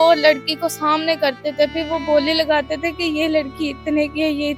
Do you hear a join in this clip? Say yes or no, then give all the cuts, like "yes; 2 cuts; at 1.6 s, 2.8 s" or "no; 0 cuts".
no; 0 cuts